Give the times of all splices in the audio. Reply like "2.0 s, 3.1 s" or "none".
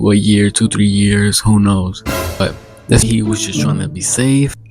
3.0 s